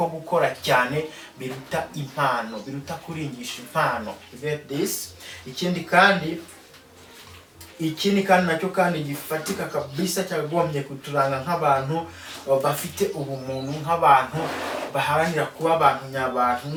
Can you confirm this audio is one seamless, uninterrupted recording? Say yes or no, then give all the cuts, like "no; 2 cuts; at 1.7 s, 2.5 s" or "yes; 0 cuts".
yes; 0 cuts